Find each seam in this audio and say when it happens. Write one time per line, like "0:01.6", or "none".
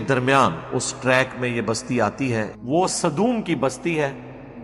0:02.5